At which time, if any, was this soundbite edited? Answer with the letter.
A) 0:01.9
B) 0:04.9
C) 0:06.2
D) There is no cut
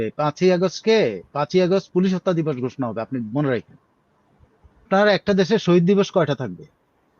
B